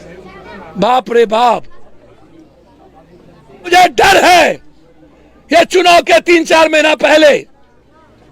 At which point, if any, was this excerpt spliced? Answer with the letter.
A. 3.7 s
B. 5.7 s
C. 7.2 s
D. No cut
A